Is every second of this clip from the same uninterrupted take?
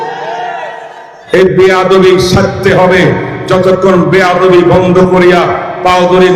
no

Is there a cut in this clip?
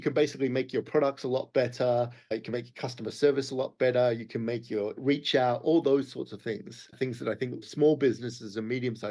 yes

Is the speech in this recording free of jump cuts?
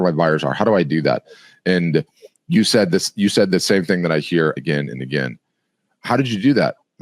yes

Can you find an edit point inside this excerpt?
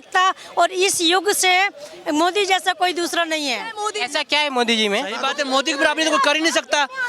yes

